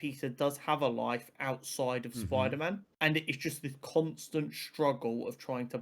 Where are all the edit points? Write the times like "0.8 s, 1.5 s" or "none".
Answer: 2.9 s